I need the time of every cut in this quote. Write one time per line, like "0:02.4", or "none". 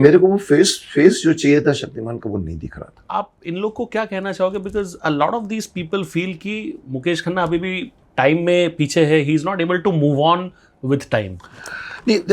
0:03.1

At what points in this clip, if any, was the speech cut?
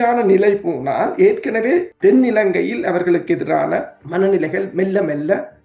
0:01.9
0:04.0

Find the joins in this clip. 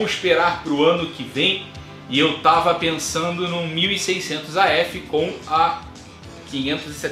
none

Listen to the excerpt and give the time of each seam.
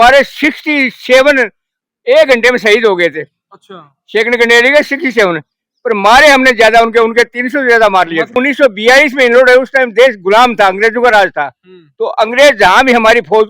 0:08.4

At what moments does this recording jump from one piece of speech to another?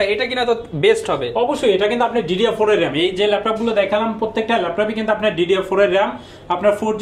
none

